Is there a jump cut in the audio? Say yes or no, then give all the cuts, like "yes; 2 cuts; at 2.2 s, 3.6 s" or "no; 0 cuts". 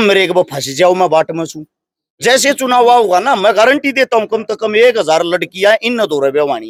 no; 0 cuts